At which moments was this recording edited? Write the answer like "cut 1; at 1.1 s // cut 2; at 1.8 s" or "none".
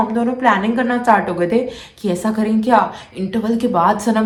none